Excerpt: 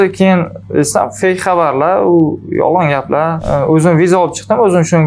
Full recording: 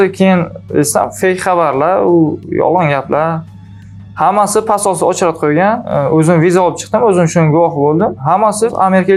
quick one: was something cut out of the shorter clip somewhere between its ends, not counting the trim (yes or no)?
yes